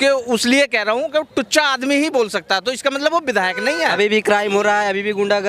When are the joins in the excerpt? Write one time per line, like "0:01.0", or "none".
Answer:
0:03.9